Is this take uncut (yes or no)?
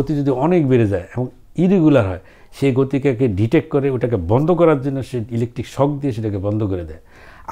yes